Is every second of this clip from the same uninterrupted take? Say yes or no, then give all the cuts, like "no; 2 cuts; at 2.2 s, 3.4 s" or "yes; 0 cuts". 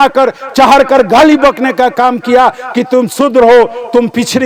yes; 0 cuts